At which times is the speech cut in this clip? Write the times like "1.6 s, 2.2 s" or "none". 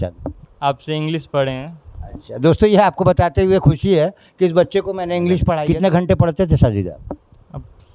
5.5 s